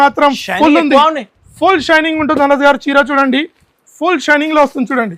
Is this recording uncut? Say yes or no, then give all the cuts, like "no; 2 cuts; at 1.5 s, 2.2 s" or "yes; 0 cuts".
yes; 0 cuts